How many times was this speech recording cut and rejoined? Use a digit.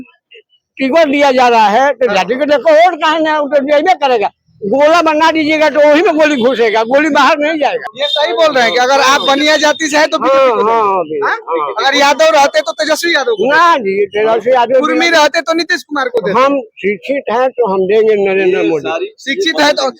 1